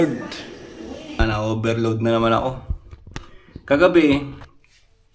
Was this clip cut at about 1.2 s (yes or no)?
yes